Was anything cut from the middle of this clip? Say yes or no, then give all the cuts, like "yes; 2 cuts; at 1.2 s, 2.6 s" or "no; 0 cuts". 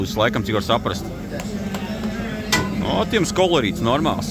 no; 0 cuts